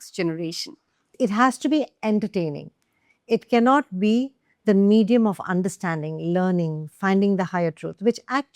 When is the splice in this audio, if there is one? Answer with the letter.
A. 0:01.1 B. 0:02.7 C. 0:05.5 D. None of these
A